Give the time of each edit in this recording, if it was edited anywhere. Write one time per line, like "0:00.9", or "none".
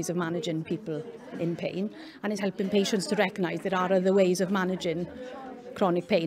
0:02.4